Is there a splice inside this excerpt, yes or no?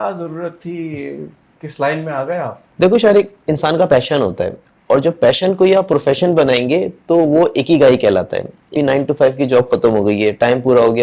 yes